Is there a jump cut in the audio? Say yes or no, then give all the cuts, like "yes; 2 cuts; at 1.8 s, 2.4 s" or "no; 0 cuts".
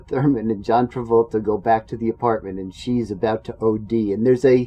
no; 0 cuts